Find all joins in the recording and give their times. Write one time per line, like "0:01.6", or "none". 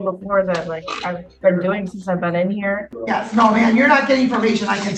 0:02.9